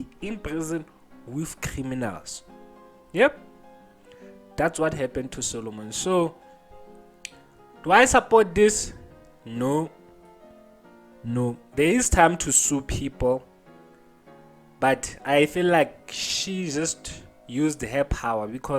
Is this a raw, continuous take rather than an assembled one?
yes; 0 cuts

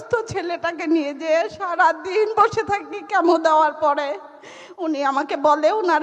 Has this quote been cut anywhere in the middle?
no; 0 cuts

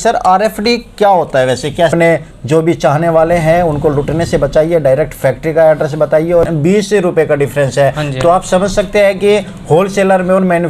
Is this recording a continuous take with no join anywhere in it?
no; 2 cuts; at 1.9 s, 6.5 s

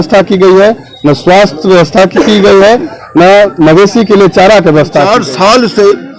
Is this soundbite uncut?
no; 1 cut; at 5.1 s

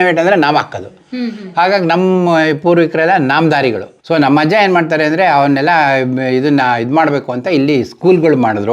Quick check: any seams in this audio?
yes; 1 cut; at 3.9 s

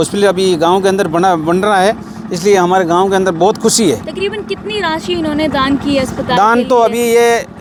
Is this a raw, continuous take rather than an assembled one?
yes; 0 cuts

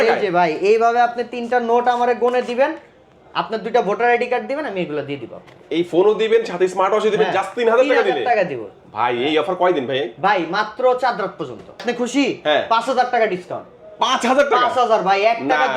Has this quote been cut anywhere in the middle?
yes; 1 cut; at 11.8 s

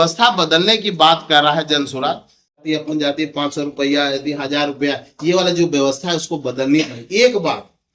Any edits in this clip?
yes; 1 cut; at 2.6 s

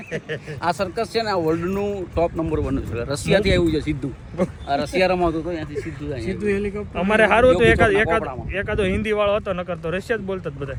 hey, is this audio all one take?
yes; 0 cuts

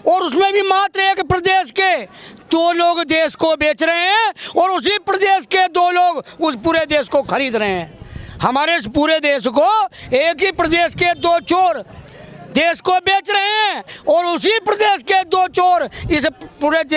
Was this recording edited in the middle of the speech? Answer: no; 0 cuts

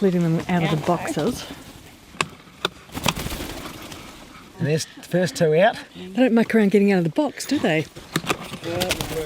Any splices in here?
yes; 2 cuts; at 2.4 s, 8.0 s

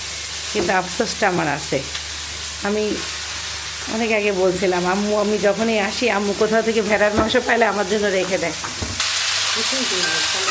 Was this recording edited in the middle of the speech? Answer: no; 0 cuts

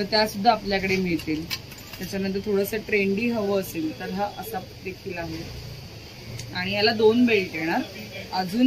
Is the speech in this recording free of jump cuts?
yes; 0 cuts

